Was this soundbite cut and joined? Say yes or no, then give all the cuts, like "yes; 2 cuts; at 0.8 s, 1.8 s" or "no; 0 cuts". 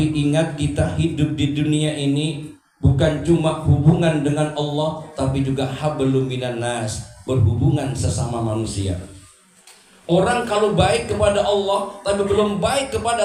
no; 0 cuts